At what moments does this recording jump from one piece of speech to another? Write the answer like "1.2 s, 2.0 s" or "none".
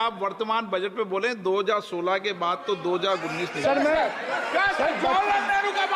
none